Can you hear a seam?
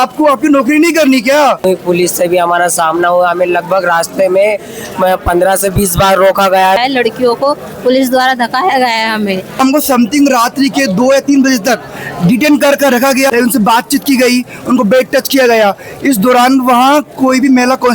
yes; 4 cuts; at 1.6 s, 6.8 s, 9.6 s, 13.3 s

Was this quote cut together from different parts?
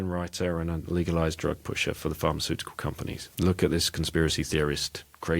yes; 1 cut; at 3.2 s

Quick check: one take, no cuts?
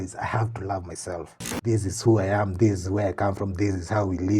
no; 1 cut; at 1.5 s

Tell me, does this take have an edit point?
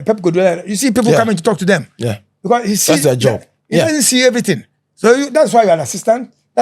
no; 0 cuts

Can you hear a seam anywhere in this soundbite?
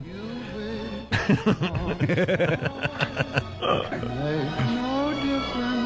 yes; 1 cut; at 2.8 s

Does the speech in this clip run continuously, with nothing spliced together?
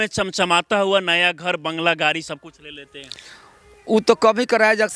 yes; 0 cuts

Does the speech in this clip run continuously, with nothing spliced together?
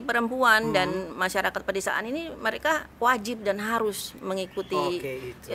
yes; 0 cuts

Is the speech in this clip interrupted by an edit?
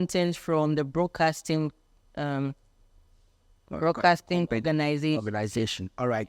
no; 0 cuts

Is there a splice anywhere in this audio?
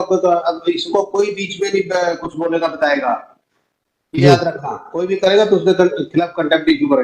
no; 0 cuts

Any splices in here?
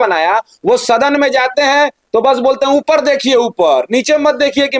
no; 0 cuts

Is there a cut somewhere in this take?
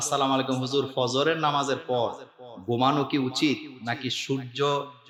no; 0 cuts

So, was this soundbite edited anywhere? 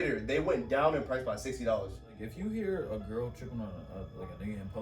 yes; 1 cut; at 2.2 s

